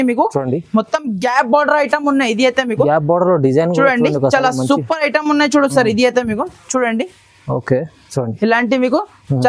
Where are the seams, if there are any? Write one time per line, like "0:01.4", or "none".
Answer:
none